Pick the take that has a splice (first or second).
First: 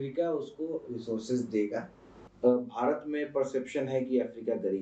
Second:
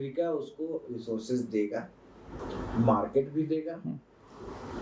first